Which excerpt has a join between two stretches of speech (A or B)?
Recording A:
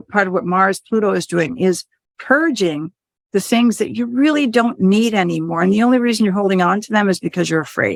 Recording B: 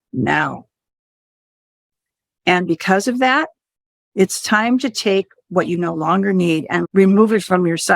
B